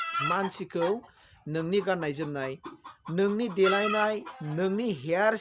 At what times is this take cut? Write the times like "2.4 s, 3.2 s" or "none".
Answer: none